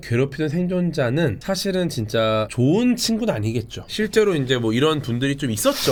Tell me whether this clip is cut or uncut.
uncut